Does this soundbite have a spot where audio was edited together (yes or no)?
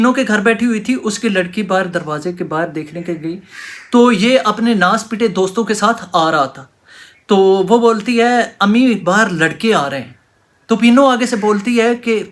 no